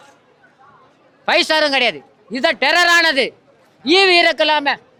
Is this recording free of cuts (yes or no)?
yes